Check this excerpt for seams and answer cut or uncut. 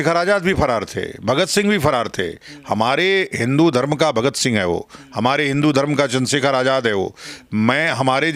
uncut